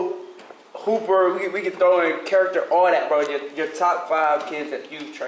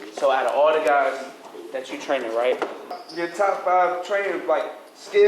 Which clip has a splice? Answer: second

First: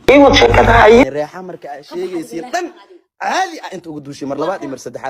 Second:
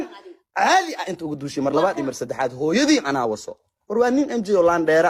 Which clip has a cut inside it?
first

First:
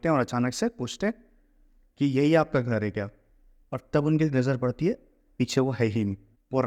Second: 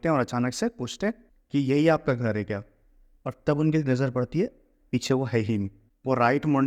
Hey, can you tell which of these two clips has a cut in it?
second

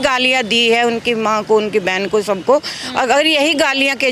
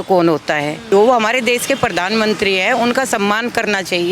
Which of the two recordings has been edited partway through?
second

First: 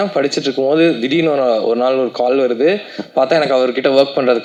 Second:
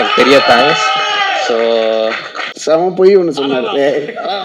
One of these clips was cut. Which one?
second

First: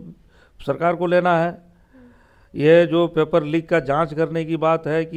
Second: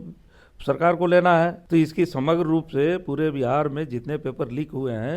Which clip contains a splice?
second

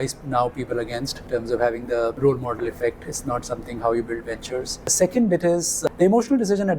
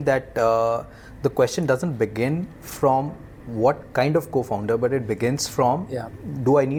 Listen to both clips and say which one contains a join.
first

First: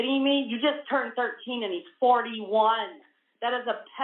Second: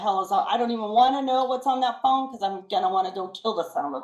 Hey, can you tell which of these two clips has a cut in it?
second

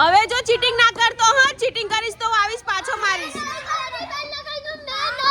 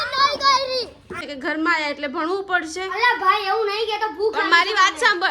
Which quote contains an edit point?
second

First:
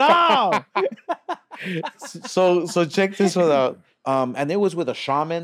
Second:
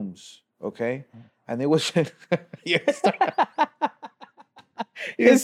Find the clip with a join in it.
first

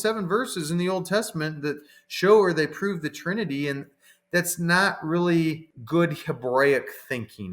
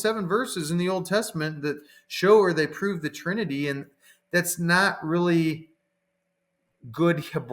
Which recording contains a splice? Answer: first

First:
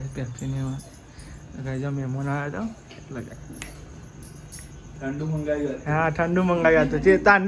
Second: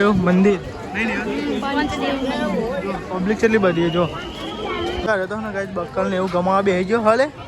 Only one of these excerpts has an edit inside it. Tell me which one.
second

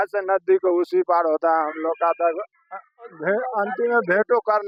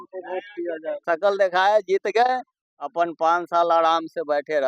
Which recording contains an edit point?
second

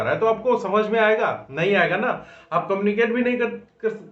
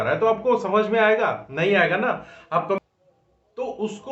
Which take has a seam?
second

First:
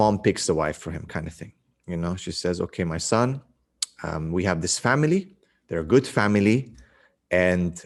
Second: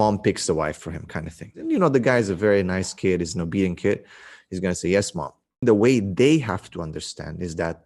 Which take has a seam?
second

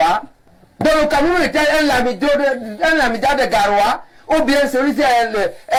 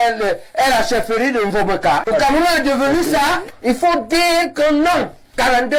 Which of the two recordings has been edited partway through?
second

